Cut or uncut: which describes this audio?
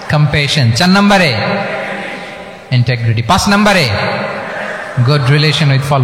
uncut